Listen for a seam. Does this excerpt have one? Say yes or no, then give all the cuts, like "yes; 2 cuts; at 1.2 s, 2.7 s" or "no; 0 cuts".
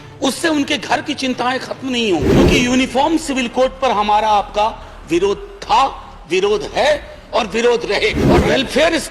yes; 2 cuts; at 2.4 s, 8.2 s